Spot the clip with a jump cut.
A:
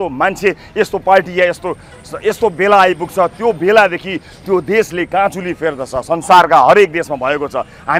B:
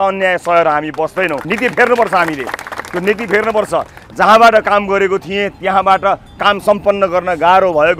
B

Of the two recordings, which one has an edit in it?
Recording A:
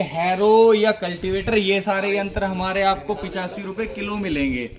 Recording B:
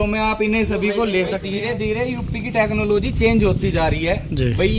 B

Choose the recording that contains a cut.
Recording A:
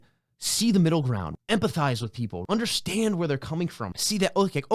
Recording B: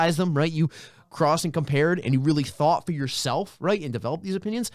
A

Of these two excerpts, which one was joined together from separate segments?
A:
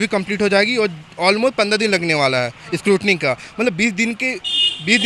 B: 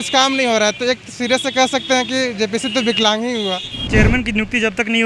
B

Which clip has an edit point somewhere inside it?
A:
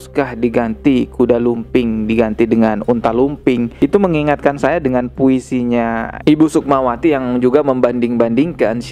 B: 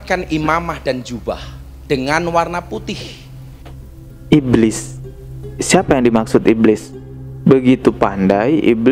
A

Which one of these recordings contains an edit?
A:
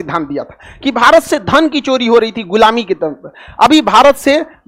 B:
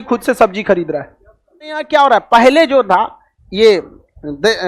B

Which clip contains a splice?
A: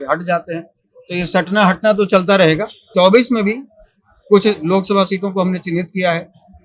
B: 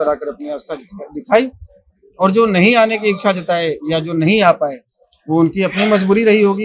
A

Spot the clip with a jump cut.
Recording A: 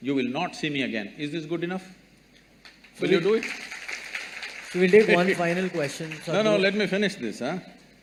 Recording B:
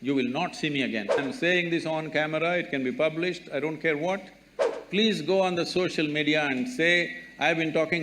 B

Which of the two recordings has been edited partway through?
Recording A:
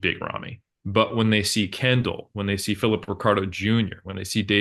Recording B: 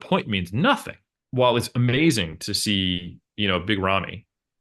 B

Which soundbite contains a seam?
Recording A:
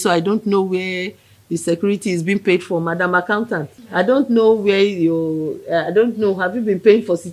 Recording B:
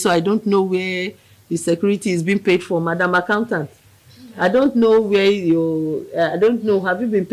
A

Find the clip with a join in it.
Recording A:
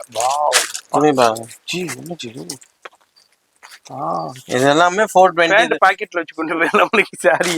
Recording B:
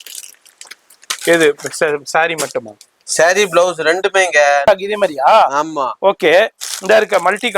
B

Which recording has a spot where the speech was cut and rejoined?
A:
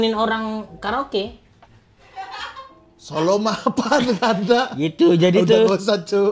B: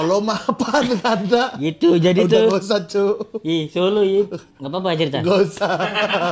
A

